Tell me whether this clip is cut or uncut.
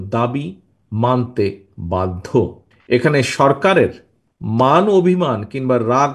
uncut